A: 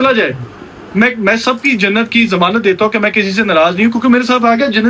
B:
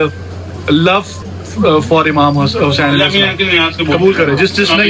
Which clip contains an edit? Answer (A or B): B